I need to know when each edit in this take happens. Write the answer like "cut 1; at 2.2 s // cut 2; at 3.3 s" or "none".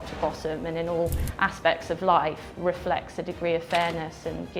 none